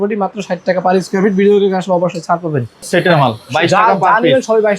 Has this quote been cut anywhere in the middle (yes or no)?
yes